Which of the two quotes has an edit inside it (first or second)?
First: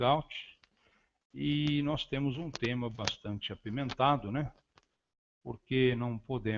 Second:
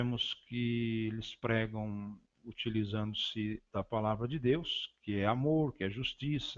second